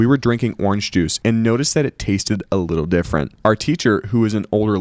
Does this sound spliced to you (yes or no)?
yes